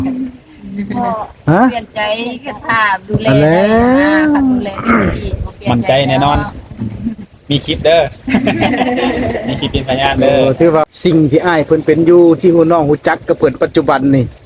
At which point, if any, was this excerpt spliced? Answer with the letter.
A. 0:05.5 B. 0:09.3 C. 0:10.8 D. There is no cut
C